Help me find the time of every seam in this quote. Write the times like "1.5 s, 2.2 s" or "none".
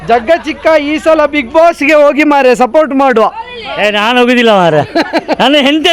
none